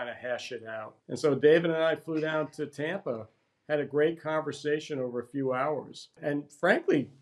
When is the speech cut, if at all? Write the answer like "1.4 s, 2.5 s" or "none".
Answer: 1.0 s, 6.2 s